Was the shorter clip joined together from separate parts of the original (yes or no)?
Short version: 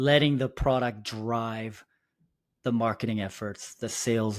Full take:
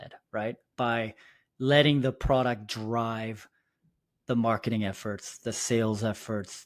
no